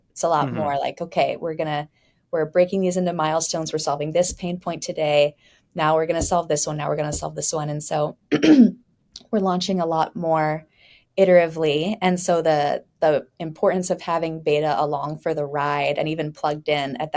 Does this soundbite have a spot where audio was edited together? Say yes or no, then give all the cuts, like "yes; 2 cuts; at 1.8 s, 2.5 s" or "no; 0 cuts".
no; 0 cuts